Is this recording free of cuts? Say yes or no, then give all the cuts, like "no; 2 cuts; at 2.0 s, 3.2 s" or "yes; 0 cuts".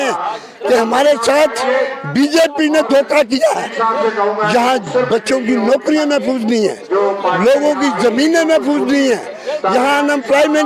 yes; 0 cuts